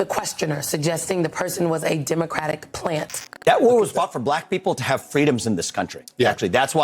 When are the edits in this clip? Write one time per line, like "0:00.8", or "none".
0:03.3